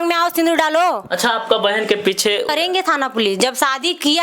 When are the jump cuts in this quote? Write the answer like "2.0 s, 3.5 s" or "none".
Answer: 2.5 s